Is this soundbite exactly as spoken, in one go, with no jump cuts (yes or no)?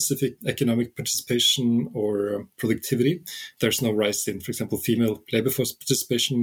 yes